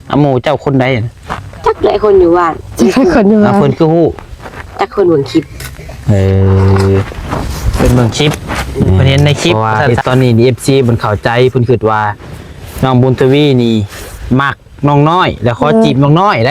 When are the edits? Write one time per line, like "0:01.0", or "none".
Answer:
0:09.5